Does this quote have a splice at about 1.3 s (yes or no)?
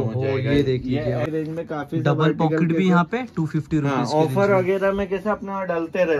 yes